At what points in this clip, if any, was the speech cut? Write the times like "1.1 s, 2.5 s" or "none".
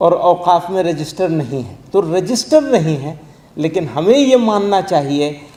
none